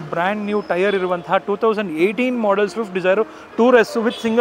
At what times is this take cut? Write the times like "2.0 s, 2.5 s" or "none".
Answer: none